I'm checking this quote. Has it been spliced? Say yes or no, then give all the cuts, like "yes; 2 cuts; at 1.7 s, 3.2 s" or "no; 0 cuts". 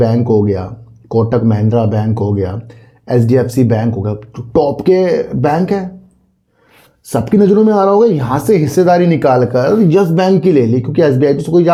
no; 0 cuts